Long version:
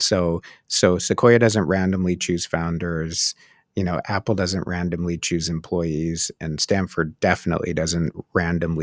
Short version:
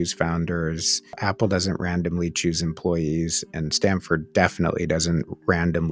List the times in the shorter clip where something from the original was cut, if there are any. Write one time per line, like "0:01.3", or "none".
0:01.2